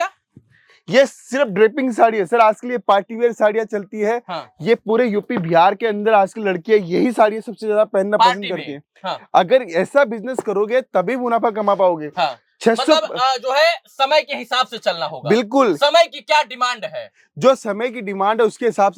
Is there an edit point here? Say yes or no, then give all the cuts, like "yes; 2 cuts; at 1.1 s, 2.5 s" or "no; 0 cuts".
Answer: no; 0 cuts